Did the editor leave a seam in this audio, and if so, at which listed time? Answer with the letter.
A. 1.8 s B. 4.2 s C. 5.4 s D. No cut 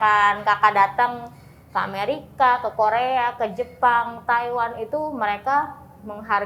D